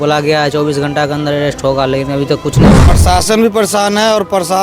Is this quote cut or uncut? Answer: cut